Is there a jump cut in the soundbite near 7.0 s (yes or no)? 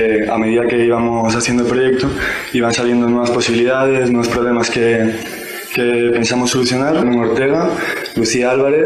no